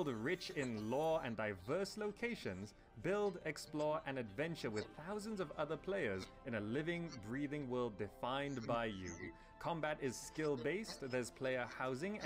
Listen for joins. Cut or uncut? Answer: uncut